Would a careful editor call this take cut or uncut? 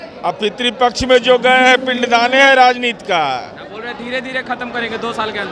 uncut